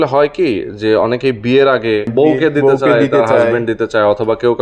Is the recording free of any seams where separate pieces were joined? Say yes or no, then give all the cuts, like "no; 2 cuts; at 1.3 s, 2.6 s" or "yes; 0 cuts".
no; 1 cut; at 2.1 s